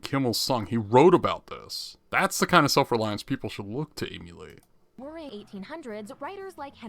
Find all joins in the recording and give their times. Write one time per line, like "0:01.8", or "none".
0:05.3